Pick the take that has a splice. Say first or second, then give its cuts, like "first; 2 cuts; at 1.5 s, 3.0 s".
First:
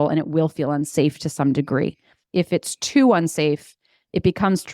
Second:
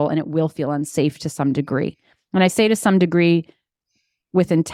first; 1 cut; at 2.1 s